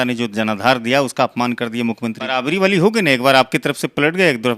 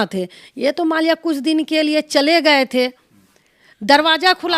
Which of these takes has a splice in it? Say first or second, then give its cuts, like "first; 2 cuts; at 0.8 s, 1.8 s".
first; 1 cut; at 2.2 s